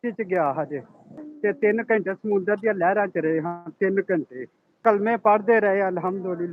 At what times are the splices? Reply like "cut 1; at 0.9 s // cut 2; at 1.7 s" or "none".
cut 1; at 1.2 s // cut 2; at 4.8 s